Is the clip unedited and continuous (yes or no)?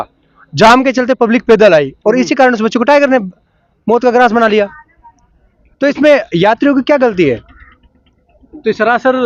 yes